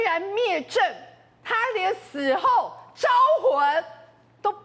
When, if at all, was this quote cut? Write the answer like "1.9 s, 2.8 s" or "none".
none